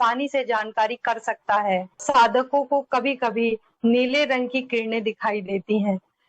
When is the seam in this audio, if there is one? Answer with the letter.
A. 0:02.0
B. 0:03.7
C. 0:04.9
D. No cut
A